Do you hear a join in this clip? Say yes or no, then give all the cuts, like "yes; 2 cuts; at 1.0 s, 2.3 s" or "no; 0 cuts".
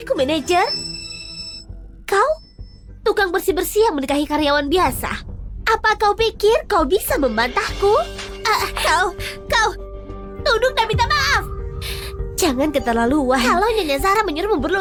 no; 0 cuts